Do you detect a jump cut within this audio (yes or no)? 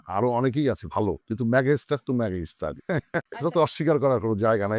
yes